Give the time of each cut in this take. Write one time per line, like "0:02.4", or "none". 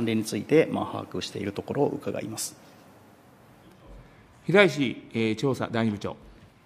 none